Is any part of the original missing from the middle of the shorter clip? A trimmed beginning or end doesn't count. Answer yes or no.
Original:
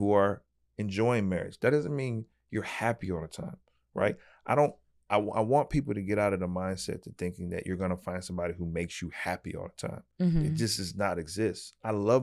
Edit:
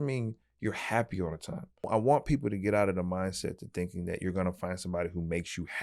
yes